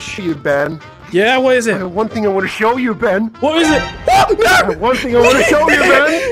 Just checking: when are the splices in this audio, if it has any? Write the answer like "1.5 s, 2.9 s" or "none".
none